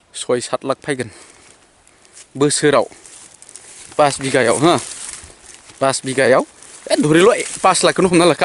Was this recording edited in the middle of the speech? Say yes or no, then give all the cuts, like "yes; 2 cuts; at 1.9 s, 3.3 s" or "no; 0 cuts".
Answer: no; 0 cuts